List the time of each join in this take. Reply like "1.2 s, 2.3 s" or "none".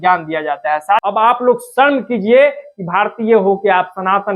1.0 s